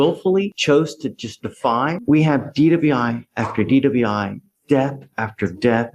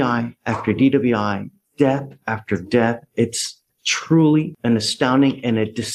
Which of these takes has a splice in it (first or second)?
first